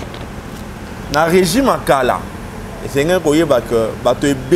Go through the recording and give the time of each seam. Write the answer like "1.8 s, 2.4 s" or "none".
1.0 s

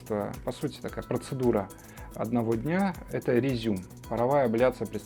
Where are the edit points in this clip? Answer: none

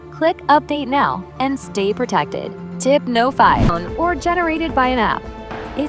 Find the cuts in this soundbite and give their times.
3.7 s

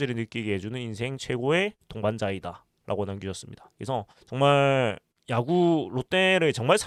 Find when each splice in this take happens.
none

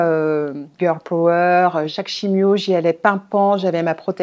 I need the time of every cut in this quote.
2.0 s

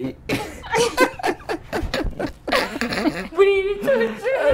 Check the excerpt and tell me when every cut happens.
3.2 s

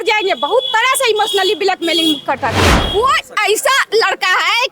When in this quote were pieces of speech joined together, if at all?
2.7 s

